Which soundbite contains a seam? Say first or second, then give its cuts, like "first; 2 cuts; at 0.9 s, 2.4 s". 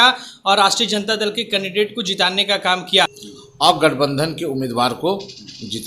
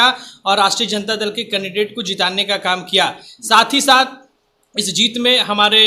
first; 1 cut; at 3.3 s